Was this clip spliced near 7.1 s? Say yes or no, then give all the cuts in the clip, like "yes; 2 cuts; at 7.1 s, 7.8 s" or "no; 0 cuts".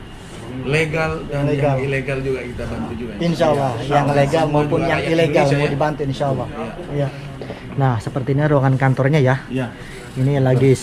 yes; 1 cut; at 7.1 s